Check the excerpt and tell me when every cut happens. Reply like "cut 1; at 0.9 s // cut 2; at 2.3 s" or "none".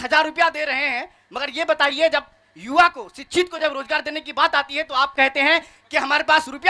none